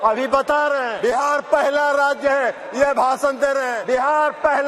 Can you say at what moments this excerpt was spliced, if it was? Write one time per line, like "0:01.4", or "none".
0:00.9
0:03.8